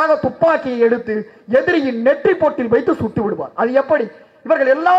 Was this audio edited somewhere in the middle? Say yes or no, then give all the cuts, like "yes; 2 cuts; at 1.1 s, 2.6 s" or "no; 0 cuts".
no; 0 cuts